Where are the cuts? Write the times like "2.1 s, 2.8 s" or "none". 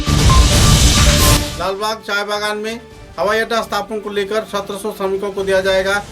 1.3 s